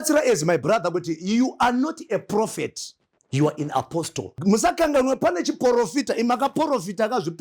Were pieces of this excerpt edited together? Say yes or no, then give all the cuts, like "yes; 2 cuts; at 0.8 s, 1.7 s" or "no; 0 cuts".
yes; 1 cut; at 4.2 s